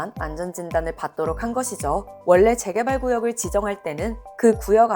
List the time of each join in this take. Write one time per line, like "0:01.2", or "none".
0:02.1

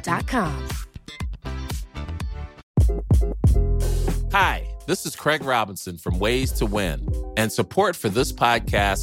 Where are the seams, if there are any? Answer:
0:02.6

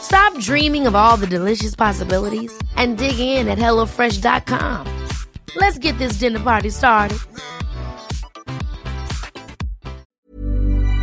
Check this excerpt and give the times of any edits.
0:10.0

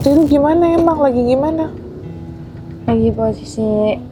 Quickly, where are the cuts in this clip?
none

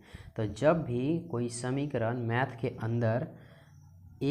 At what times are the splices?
none

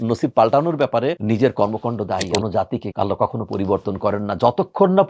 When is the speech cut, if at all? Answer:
0:01.2
0:02.4

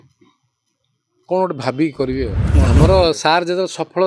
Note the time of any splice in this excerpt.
0:02.4

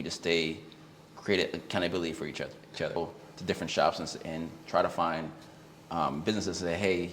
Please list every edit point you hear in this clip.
0:03.0

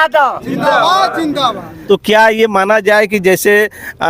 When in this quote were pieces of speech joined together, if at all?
0:01.7

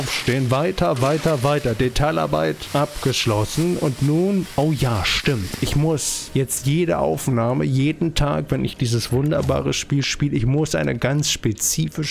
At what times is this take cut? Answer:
0:02.6
0:04.5
0:06.2

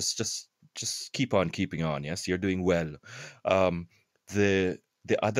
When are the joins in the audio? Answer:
none

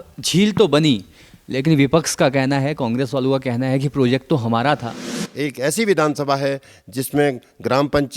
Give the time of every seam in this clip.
0:05.1

